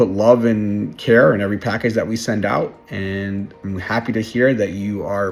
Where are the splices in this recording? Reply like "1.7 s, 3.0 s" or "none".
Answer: none

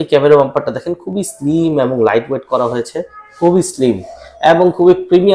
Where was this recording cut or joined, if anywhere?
none

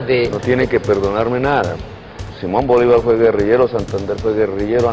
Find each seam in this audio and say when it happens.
2.3 s

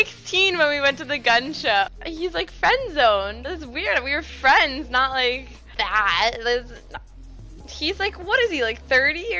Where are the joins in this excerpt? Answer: 1.9 s

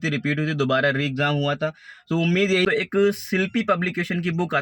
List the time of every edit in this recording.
2.7 s

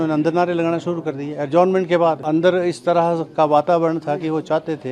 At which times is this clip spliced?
2.2 s

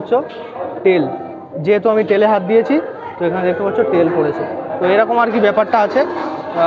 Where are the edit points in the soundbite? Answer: none

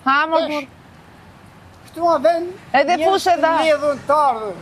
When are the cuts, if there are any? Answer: none

